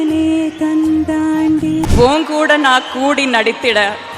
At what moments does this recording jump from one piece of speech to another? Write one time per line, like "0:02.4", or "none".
0:01.9

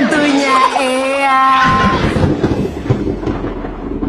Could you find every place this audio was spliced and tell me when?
0:01.8

